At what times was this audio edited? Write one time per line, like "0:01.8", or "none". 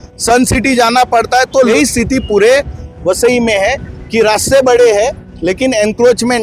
0:01.7